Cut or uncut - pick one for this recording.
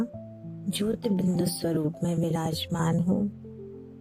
uncut